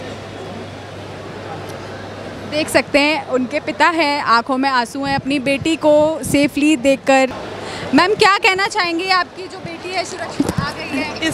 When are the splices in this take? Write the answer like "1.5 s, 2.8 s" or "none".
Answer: 7.4 s

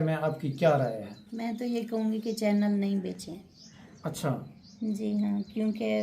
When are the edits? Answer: 1.2 s

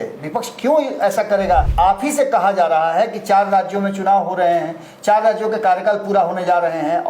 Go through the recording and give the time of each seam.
1.7 s

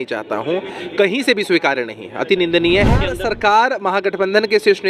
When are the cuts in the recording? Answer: 3.1 s

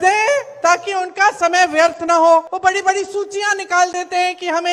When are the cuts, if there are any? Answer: 2.5 s

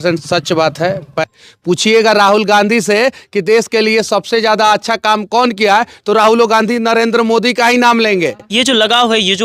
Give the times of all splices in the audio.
1.1 s, 8.4 s

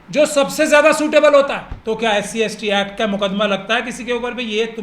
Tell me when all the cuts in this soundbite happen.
1.7 s

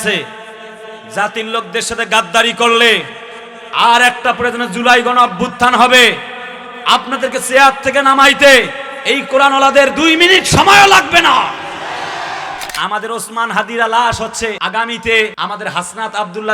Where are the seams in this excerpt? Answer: 12.7 s, 14.6 s, 15.3 s

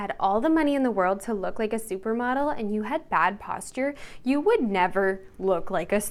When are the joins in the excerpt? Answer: none

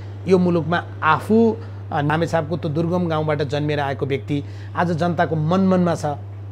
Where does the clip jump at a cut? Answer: 2.1 s

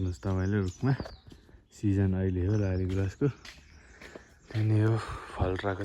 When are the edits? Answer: none

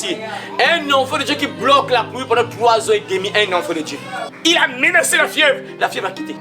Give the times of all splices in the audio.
4.3 s

